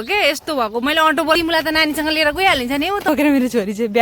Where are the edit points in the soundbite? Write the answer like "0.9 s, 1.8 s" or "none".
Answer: 1.3 s, 3.1 s